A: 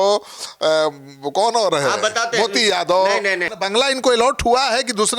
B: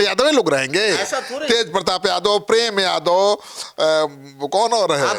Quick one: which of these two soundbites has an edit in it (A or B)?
A